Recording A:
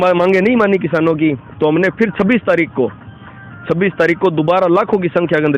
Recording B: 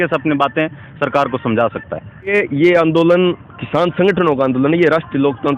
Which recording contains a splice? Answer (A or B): B